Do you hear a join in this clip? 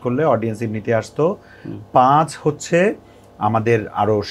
no; 0 cuts

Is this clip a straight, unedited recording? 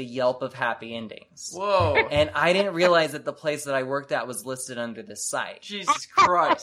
yes; 0 cuts

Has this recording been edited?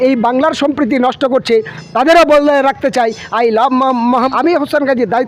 yes; 1 cut; at 4.3 s

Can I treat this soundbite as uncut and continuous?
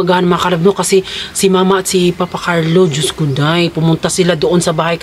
yes; 0 cuts

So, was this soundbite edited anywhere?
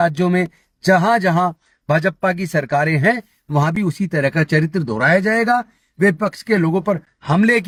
no; 0 cuts

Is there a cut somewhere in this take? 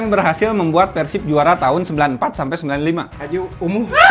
yes; 1 cut; at 3.2 s

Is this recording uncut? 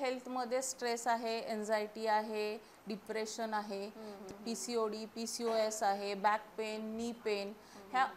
no; 1 cut; at 4.2 s

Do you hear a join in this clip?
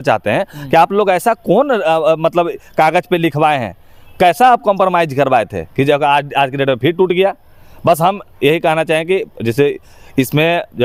no; 0 cuts

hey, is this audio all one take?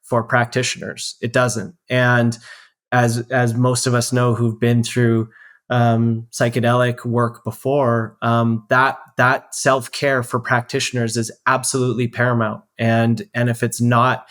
yes; 0 cuts

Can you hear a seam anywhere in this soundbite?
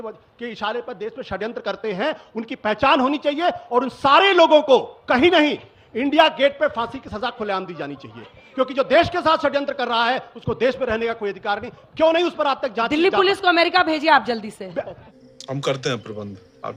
no; 0 cuts

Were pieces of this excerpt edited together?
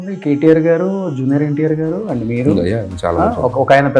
no; 0 cuts

